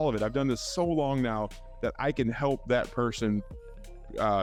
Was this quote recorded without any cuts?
yes; 0 cuts

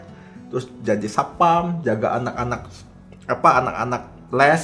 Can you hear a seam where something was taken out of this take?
no; 0 cuts

